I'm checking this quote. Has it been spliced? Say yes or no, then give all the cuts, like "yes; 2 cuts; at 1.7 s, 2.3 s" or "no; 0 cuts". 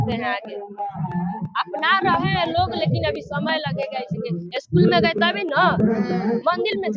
yes; 1 cut; at 4.2 s